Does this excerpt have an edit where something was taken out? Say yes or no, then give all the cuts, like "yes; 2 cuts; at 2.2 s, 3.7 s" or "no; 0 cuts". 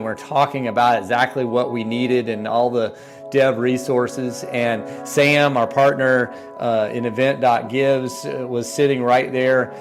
no; 0 cuts